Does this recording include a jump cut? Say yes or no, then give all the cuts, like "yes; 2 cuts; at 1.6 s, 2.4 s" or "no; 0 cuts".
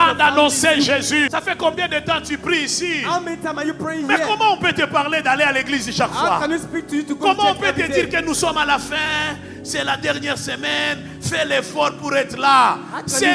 yes; 1 cut; at 1.3 s